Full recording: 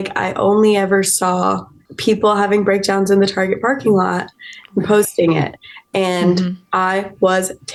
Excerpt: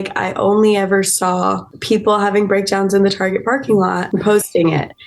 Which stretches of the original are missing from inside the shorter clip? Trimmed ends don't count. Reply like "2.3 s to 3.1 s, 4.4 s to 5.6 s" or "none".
1.7 s to 1.9 s, 4.2 s to 4.7 s

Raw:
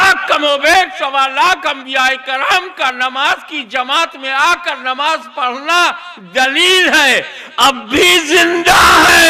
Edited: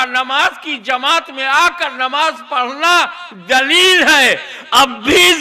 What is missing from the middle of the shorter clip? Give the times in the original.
none

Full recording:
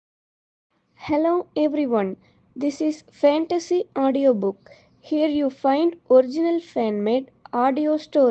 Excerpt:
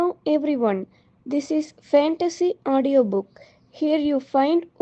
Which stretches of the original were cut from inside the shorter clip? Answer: none

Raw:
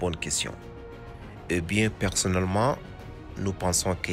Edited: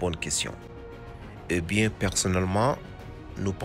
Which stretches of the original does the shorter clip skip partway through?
none

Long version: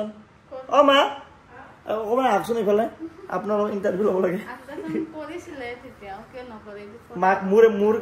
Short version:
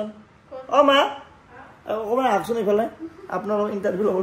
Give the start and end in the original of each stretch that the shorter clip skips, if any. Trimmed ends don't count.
none

